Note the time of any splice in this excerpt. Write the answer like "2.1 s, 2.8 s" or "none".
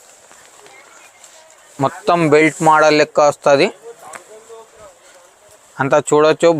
4.6 s